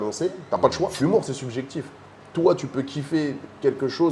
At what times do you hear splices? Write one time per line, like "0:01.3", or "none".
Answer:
0:00.9